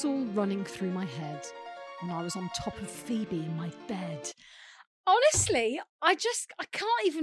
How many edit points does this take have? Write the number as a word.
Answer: zero